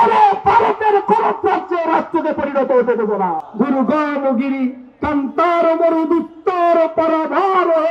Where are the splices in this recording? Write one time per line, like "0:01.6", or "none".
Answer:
0:03.4